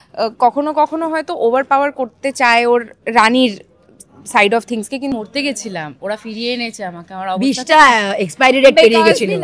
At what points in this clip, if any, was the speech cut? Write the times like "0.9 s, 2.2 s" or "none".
5.2 s